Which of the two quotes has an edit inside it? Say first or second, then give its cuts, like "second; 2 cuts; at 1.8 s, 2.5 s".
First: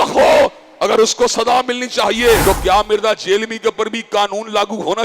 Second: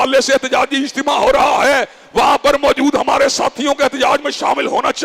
first; 1 cut; at 2.4 s